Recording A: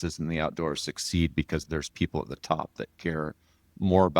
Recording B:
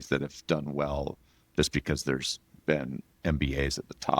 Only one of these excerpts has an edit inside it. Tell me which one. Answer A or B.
A